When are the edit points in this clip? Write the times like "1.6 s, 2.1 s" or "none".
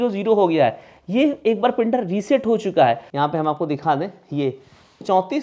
3.1 s